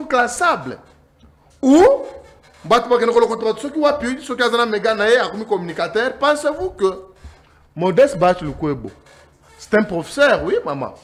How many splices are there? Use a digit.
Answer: 0